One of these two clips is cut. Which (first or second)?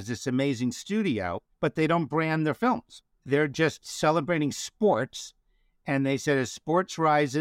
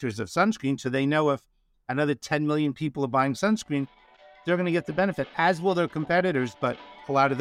first